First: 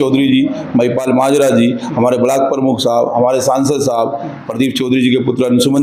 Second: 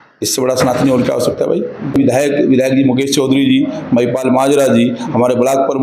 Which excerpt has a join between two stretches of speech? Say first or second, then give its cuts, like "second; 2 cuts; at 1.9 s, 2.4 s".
second; 1 cut; at 1.9 s